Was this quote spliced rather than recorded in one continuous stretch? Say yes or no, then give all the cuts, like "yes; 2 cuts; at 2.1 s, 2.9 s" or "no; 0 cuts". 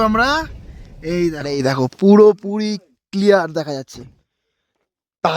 yes; 1 cut; at 1.4 s